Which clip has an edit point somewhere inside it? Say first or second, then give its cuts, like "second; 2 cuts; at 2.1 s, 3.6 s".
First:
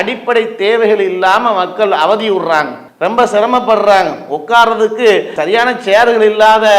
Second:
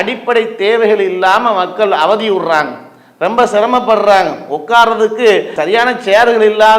first; 1 cut; at 2.8 s